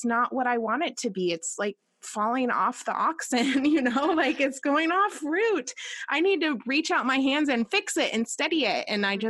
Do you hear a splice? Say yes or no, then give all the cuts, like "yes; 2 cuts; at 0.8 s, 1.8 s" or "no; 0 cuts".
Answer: no; 0 cuts